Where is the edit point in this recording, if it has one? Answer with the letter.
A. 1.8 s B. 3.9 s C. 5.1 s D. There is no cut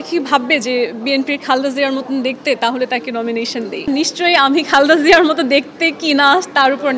B